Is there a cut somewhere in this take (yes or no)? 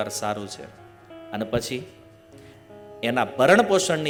no